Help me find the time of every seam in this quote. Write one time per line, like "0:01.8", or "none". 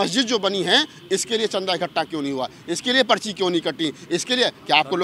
none